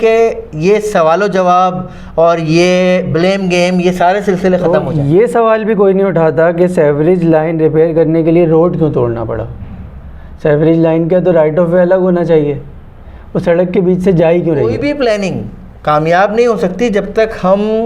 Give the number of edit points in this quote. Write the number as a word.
two